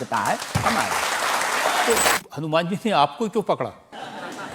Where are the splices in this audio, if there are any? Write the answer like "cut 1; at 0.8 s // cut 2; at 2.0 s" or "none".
cut 1; at 2.2 s